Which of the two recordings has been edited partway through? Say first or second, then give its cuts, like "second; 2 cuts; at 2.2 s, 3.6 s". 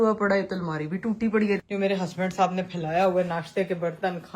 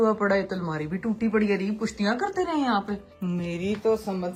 first; 1 cut; at 1.6 s